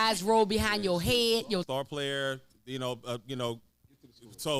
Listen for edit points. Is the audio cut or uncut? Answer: cut